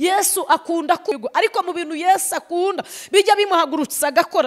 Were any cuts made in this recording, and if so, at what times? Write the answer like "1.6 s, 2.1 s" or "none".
1.2 s